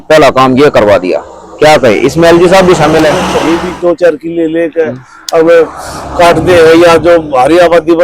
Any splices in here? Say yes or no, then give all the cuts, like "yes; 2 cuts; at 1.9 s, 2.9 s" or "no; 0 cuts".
yes; 1 cut; at 3.3 s